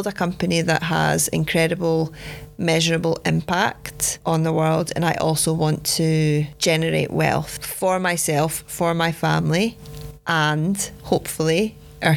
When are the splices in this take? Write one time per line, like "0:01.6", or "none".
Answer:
none

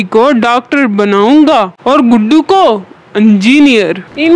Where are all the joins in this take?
none

